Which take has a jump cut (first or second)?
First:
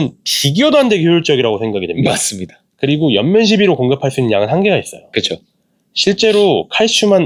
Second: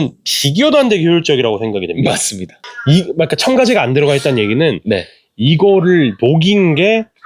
second